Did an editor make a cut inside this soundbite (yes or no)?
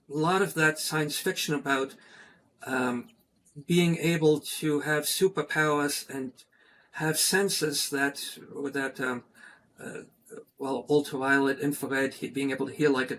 no